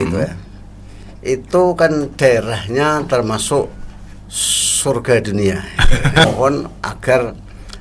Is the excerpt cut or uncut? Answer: cut